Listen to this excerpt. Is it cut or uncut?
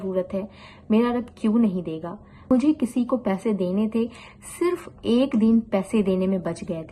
cut